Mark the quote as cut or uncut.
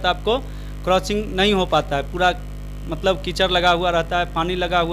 uncut